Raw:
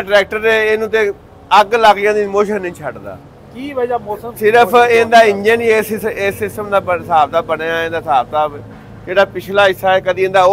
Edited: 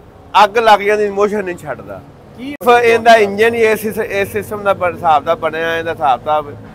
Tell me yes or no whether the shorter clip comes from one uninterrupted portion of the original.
no